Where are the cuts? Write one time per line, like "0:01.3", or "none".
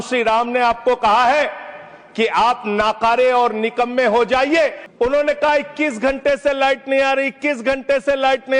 0:04.8